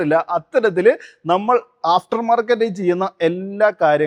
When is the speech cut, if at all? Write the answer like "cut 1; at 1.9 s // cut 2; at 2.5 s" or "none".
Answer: none